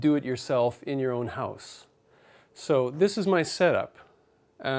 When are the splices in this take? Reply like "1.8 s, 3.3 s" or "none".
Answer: 3.8 s